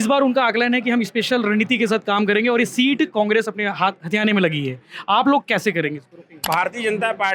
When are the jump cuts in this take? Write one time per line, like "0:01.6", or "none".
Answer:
0:06.4